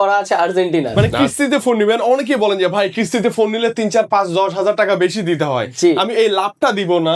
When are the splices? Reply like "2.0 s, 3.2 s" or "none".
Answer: 0.9 s